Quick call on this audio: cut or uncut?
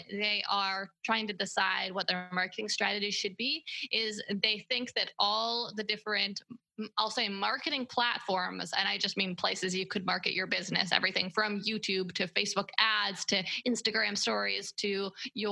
uncut